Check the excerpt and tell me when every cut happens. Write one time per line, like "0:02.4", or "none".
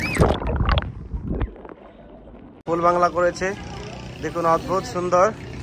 0:02.6